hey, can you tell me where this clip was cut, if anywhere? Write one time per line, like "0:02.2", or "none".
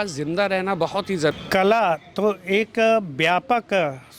0:01.3